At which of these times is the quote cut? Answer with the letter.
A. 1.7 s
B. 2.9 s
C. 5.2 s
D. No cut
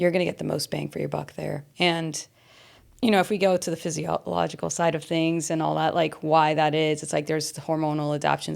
A